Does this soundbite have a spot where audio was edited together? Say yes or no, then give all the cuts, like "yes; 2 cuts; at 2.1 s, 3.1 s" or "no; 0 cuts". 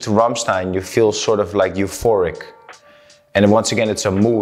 no; 0 cuts